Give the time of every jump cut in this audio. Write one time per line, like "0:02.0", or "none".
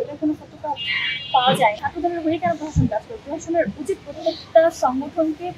0:01.8